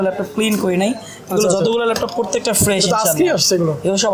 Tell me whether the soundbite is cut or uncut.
uncut